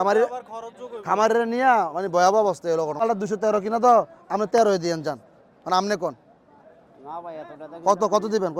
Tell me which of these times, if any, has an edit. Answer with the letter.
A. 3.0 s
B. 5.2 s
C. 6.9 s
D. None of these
A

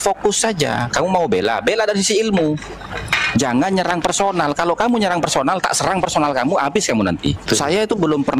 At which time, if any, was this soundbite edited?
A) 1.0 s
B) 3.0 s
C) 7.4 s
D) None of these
C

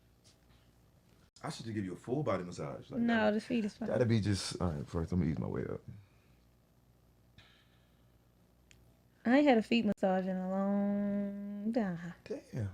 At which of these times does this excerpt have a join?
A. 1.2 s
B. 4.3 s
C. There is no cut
A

